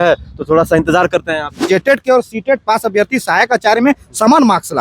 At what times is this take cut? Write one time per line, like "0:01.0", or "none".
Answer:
0:01.5